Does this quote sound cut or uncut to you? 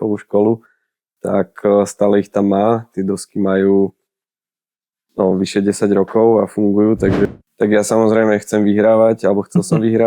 cut